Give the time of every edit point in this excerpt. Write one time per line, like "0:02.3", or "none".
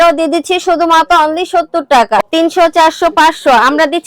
0:02.2

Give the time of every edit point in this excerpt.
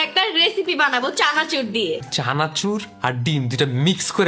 0:02.1

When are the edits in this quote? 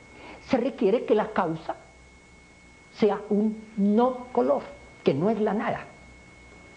none

